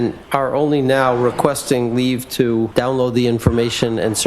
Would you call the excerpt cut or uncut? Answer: cut